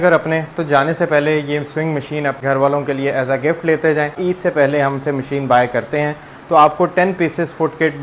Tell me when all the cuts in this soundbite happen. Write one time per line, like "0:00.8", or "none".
0:02.4
0:04.2